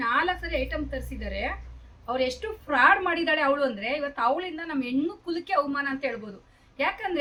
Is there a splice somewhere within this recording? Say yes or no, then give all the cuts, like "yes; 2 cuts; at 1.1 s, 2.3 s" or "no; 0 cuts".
no; 0 cuts